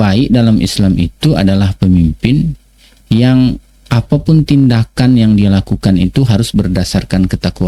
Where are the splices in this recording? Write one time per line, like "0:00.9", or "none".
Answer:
none